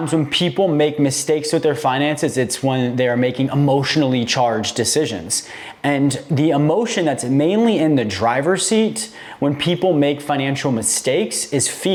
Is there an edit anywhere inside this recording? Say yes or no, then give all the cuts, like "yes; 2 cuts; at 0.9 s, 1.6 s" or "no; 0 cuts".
no; 0 cuts